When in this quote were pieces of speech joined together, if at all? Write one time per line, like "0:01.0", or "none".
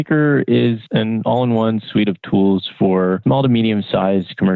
0:00.8
0:03.2